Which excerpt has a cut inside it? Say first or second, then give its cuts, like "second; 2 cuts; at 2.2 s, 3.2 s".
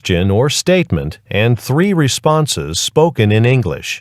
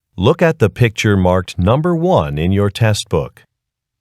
second; 1 cut; at 1.2 s